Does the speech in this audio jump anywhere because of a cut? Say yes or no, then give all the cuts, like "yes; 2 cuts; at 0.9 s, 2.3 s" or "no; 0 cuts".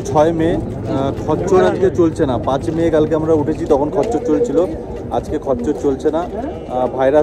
no; 0 cuts